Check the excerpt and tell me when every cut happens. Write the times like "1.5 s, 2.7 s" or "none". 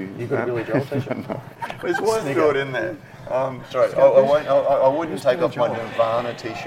1.5 s